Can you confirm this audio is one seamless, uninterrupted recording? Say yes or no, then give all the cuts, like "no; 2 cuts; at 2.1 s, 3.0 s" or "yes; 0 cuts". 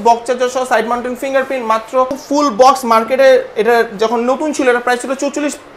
no; 1 cut; at 2.2 s